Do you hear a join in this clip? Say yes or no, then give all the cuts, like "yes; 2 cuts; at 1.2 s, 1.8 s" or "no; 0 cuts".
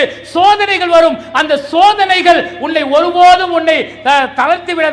no; 0 cuts